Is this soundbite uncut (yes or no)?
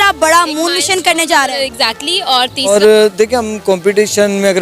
no